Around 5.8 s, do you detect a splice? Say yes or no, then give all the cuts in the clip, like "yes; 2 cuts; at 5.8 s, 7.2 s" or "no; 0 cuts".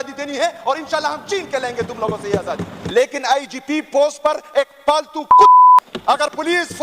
yes; 2 cuts; at 2.8 s, 5.8 s